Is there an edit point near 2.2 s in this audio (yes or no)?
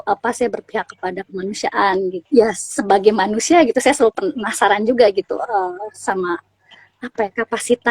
yes